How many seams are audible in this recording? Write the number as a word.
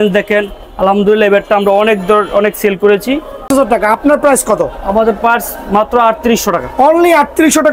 one